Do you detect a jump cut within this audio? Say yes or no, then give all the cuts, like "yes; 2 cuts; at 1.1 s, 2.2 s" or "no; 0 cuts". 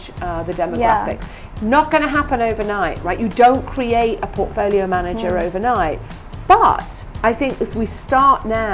no; 0 cuts